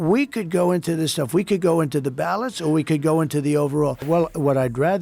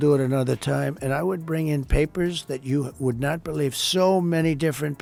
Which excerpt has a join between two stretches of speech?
first; 1 cut; at 4.0 s

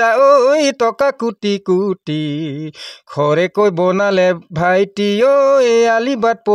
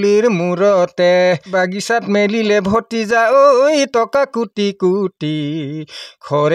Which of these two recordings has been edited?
second; 1 cut; at 1.4 s

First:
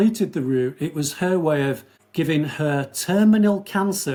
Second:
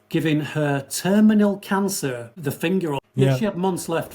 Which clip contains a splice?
second; 1 cut; at 3.0 s

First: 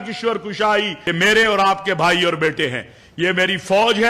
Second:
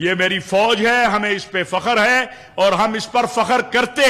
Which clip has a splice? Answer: first; 1 cut; at 1.0 s

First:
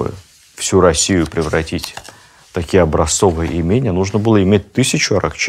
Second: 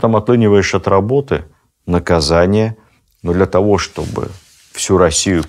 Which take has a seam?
second; 1 cut; at 2.8 s

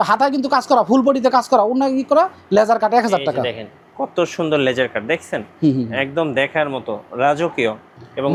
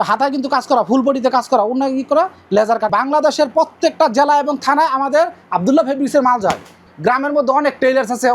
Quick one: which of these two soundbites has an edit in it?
second; 2 cuts; at 2.9 s, 6.8 s

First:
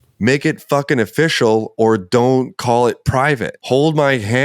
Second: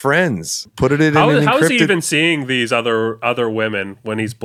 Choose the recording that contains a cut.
first; 1 cut; at 3.5 s

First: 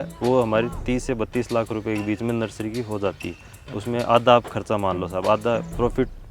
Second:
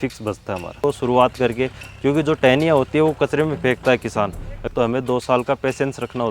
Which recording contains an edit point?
second; 2 cuts; at 0.8 s, 4.5 s

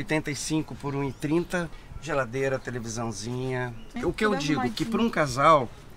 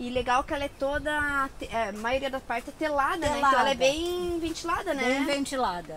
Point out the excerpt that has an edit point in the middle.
first; 2 cuts; at 1.8 s, 3.9 s

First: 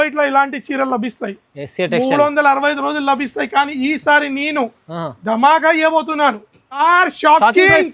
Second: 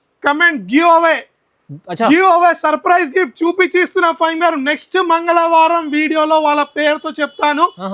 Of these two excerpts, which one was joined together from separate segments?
first; 1 cut; at 6.8 s

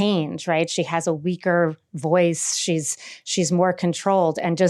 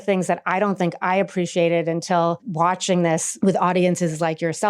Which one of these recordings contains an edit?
second; 2 cuts; at 2.5 s, 3.3 s

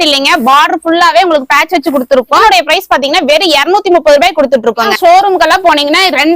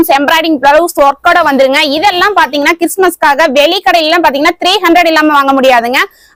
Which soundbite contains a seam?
first; 2 cuts; at 2.4 s, 4.9 s

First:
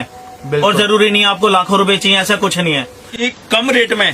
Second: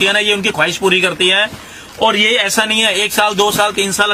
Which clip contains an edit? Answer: first; 1 cut; at 3.0 s

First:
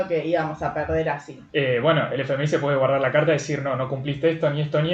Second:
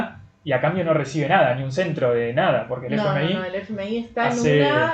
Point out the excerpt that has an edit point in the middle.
first; 1 cut; at 1.3 s

